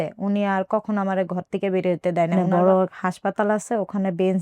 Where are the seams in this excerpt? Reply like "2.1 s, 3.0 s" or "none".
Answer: 2.4 s